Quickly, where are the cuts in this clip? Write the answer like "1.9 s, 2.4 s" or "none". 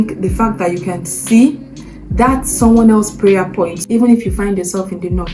3.8 s